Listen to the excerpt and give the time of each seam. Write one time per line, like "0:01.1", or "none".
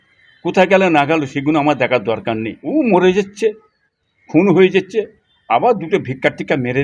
0:02.6